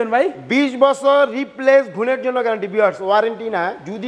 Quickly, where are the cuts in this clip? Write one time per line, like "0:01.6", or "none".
none